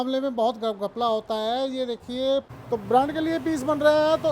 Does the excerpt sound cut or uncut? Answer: cut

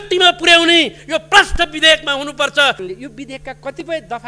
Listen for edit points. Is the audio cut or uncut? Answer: cut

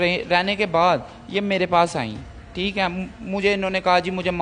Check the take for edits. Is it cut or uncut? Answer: uncut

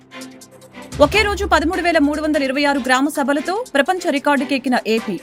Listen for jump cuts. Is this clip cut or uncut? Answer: uncut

